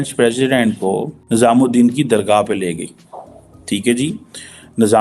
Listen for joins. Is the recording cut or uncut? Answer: cut